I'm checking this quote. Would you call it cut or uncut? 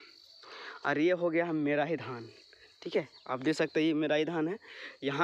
uncut